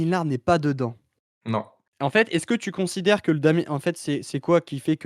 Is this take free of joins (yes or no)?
no